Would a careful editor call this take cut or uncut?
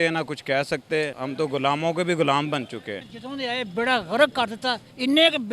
cut